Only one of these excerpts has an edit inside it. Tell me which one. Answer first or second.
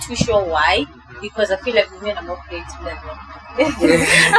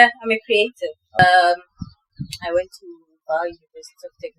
second